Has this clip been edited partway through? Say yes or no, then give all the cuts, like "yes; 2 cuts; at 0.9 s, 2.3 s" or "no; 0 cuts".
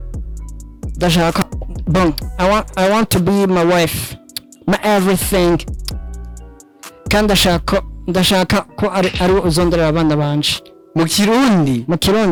no; 0 cuts